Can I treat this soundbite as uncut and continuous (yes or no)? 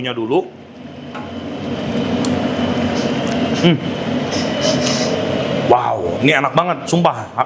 yes